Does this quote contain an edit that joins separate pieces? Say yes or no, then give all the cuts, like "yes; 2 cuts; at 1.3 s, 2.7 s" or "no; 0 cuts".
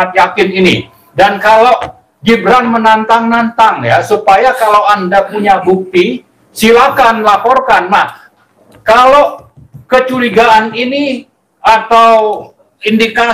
no; 0 cuts